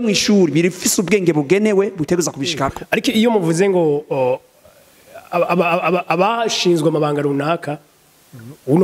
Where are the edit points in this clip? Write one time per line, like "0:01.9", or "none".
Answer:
0:02.8

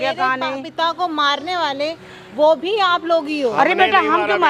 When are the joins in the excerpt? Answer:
none

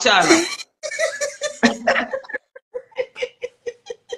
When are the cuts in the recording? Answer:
none

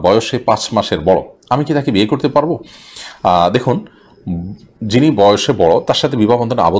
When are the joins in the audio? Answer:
none

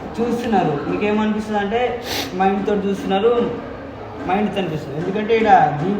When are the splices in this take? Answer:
none

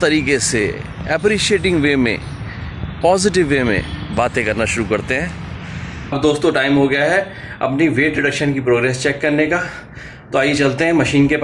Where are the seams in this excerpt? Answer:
0:06.1

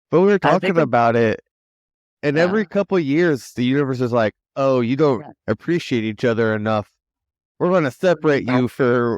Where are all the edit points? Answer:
none

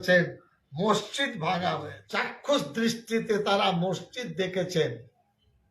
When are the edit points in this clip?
0:02.0

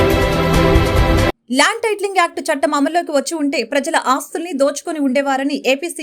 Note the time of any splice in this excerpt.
none

